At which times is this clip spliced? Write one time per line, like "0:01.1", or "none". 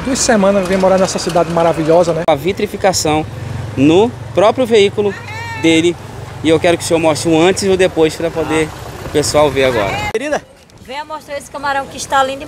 0:02.2
0:10.1